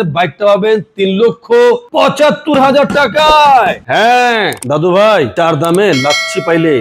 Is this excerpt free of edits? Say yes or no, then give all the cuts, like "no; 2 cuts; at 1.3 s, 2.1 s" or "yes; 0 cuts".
yes; 0 cuts